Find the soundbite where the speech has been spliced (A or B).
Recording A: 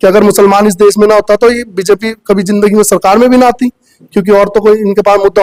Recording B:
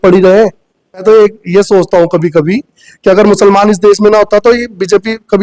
B